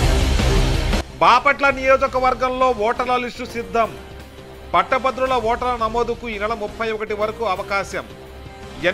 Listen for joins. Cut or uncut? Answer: uncut